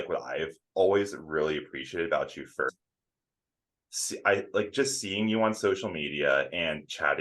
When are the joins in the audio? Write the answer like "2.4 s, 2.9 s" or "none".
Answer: 2.7 s